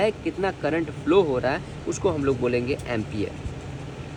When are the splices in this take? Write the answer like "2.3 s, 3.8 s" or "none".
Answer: none